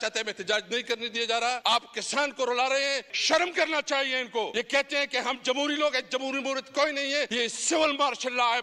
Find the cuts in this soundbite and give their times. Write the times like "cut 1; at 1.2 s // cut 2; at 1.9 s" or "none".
cut 1; at 1.6 s // cut 2; at 3.1 s // cut 3; at 4.5 s // cut 4; at 7.3 s